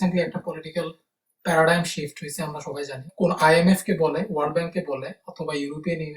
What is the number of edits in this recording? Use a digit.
1